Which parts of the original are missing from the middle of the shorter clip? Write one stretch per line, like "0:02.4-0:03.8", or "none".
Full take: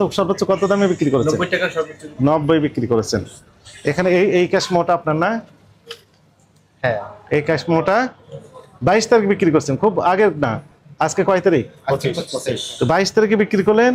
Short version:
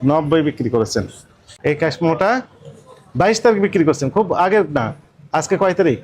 0:03.6-0:07.1